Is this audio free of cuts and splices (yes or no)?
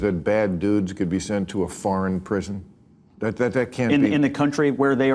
yes